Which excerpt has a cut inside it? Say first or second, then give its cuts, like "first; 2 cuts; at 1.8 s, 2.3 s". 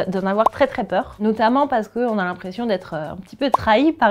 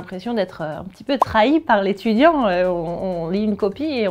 first; 1 cut; at 1.1 s